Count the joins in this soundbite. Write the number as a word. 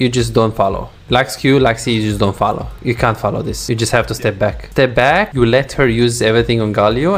five